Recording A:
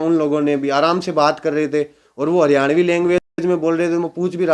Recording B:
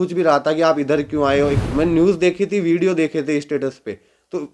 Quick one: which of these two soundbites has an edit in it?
B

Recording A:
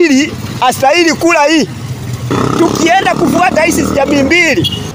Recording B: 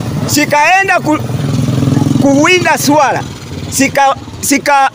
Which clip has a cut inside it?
A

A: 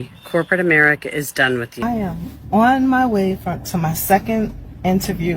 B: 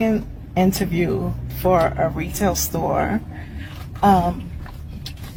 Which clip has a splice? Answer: A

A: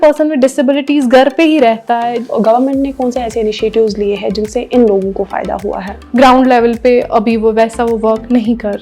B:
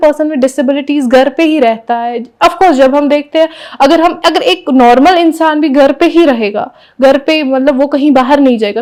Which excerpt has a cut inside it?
A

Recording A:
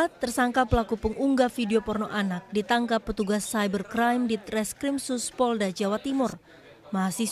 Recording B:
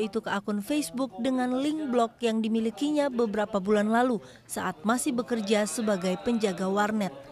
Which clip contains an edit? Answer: A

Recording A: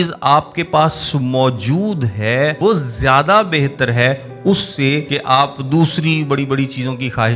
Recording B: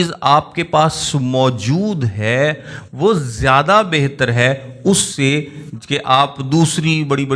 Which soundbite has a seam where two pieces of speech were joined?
A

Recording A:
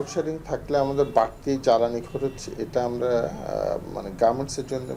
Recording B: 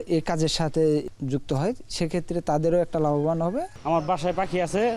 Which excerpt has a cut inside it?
B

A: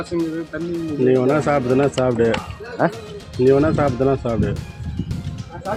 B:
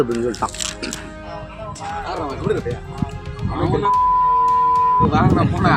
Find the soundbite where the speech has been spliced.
B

